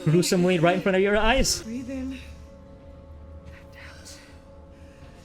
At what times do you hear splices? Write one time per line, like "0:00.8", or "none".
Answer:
0:01.6